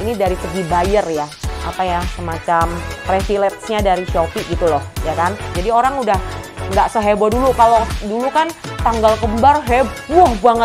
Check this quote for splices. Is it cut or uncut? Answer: cut